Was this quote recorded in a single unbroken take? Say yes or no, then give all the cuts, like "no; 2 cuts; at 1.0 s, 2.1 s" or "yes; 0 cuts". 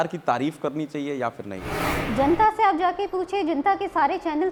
yes; 0 cuts